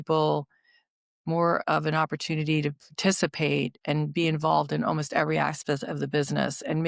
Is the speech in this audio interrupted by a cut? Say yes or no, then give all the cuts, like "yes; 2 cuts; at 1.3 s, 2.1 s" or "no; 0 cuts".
no; 0 cuts